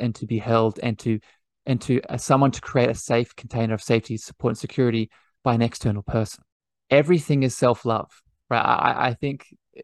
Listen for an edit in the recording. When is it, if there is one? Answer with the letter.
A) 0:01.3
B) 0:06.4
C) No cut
B